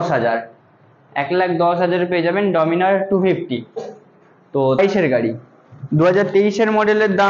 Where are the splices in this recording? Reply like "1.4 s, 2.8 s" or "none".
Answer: 4.8 s

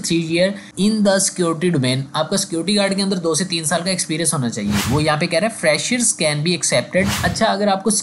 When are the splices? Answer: 4.8 s, 7.2 s

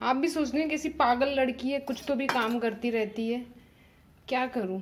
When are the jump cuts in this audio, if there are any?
none

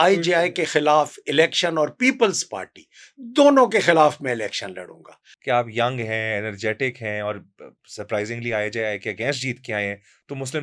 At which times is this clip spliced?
5.3 s

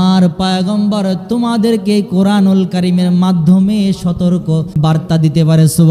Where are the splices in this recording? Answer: 4.7 s

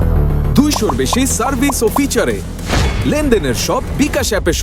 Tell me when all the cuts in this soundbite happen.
none

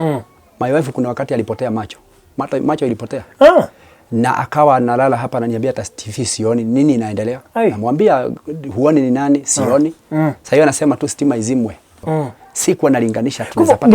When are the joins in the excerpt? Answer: 12.0 s

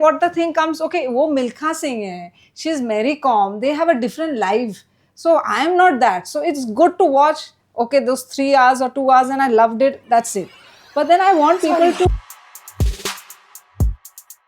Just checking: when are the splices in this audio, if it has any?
12.1 s

